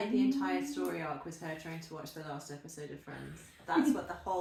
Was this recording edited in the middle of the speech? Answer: no; 0 cuts

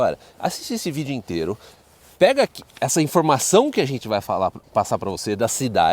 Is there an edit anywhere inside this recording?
no; 0 cuts

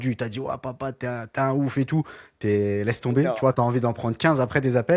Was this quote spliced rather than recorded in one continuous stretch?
no; 0 cuts

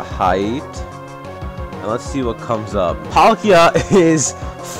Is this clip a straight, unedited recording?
no; 1 cut; at 3.0 s

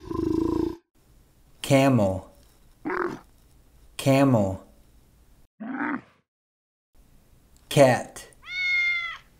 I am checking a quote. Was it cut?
yes; 1 cut; at 0.9 s

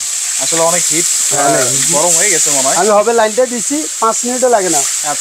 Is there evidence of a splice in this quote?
no; 0 cuts

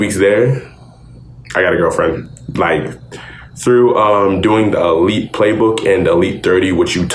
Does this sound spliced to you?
no; 0 cuts

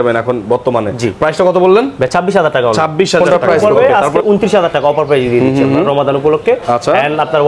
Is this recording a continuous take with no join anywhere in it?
no; 1 cut; at 3.2 s

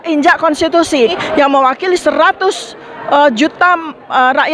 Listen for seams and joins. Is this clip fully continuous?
no; 1 cut; at 1.2 s

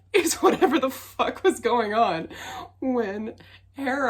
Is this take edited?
no; 0 cuts

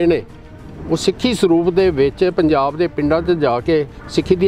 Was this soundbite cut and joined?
no; 0 cuts

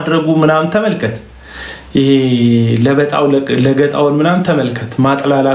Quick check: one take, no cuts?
yes; 0 cuts

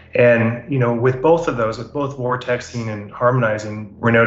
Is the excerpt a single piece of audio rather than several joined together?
yes; 0 cuts

